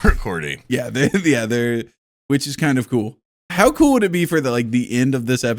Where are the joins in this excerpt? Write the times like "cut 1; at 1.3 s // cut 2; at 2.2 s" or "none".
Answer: cut 1; at 3.5 s